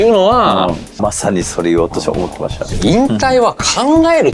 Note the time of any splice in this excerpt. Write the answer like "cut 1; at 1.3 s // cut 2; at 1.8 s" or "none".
cut 1; at 0.9 s // cut 2; at 2.7 s

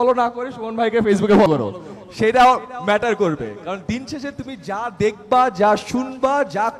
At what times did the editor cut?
cut 1; at 1.5 s

